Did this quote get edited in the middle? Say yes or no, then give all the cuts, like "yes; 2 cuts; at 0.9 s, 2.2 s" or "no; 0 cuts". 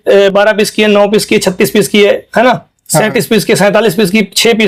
no; 0 cuts